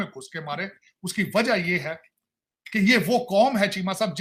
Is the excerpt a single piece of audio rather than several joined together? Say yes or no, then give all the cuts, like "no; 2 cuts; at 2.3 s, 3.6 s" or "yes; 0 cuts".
yes; 0 cuts